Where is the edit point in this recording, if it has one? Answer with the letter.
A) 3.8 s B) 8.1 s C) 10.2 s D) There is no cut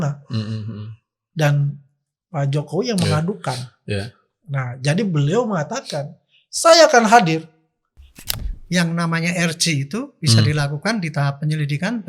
B